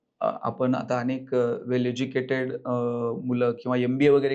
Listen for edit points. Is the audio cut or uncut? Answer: uncut